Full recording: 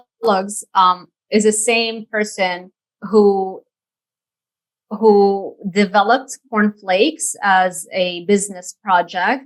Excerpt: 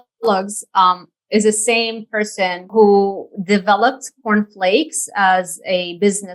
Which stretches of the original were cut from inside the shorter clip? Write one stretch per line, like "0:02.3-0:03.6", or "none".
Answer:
0:02.6-0:04.9